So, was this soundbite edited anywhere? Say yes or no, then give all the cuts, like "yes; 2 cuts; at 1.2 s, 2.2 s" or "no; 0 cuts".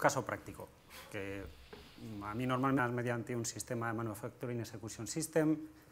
no; 0 cuts